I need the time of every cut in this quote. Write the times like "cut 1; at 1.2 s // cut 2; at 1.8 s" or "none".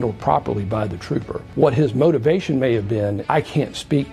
cut 1; at 1.4 s // cut 2; at 3.2 s